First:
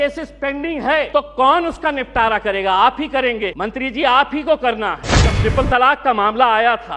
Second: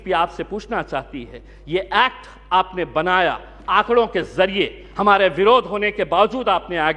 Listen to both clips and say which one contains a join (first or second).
first